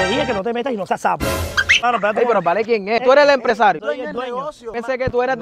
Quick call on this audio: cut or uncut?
cut